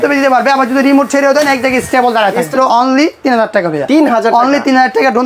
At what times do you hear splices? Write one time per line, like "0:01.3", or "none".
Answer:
0:02.5